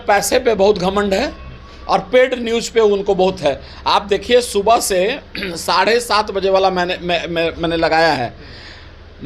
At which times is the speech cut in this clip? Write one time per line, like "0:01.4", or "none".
none